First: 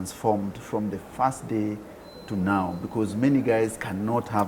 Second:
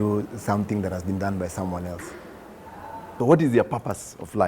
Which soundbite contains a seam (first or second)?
second